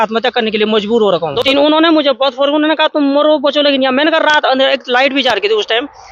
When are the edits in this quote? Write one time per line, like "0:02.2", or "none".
0:01.0